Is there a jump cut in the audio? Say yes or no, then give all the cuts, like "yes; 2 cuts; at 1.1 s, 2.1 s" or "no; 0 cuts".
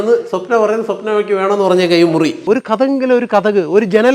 yes; 1 cut; at 2.4 s